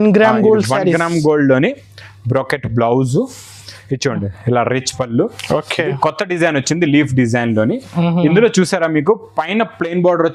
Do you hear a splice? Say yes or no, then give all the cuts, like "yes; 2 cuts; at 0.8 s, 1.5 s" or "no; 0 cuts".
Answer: no; 0 cuts